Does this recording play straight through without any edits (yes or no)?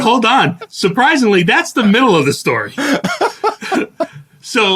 yes